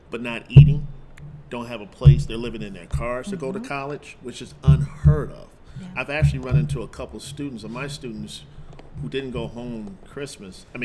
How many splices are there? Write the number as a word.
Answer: zero